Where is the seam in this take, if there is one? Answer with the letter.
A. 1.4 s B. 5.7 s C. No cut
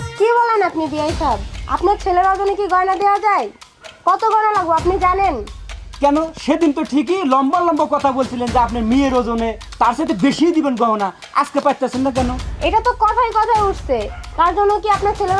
C